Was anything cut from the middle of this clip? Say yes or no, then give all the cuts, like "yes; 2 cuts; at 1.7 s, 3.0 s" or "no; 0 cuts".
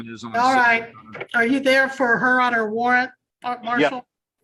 no; 0 cuts